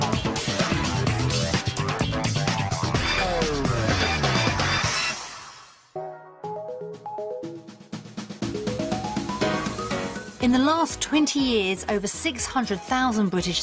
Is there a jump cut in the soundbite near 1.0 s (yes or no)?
no